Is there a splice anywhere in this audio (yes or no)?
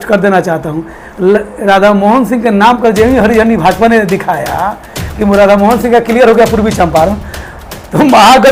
no